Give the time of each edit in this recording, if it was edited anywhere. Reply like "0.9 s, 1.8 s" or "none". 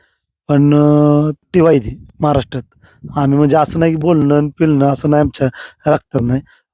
1.5 s